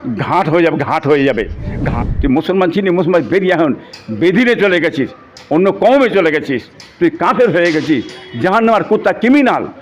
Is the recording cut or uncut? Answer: cut